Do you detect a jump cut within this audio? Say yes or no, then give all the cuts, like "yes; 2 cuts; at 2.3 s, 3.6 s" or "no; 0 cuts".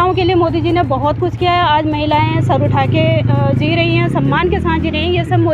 no; 0 cuts